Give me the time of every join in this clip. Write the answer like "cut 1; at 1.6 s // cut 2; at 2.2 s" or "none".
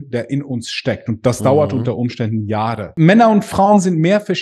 cut 1; at 2.9 s

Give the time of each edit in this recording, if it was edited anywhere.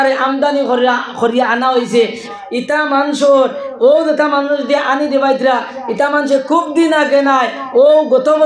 cut 1; at 2.3 s

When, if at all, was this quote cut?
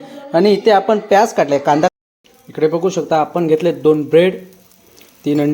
cut 1; at 1.9 s

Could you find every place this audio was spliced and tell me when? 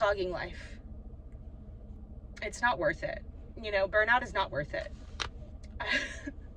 cut 1; at 2.0 s

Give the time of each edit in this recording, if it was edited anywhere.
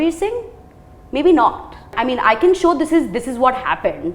cut 1; at 1.9 s

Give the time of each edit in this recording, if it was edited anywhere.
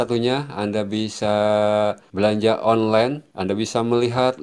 cut 1; at 2.0 s // cut 2; at 3.3 s

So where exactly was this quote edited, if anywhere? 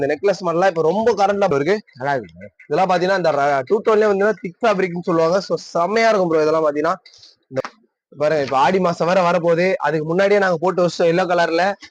cut 1; at 1.5 s // cut 2; at 7.6 s

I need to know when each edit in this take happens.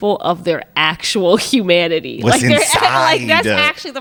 none

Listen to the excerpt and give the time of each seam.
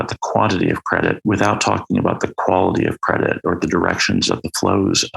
cut 1; at 1.2 s // cut 2; at 3.6 s

